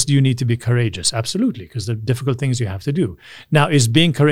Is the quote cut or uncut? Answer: uncut